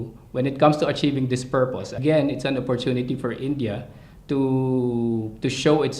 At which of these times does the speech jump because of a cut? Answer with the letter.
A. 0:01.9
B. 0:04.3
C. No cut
A